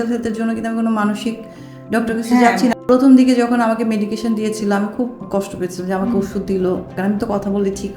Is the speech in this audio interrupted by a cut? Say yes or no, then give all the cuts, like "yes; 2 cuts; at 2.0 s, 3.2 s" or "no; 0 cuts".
yes; 3 cuts; at 2.7 s, 5.2 s, 7.0 s